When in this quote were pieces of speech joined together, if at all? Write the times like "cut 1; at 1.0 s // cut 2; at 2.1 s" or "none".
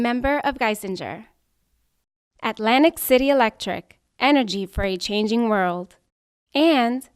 none